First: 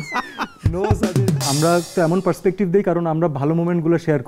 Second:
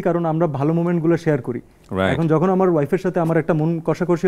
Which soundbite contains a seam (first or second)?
first